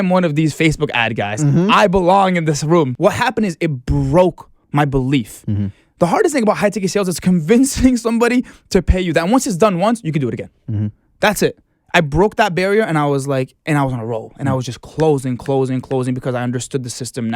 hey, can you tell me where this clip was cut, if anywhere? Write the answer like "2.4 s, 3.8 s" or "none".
2.9 s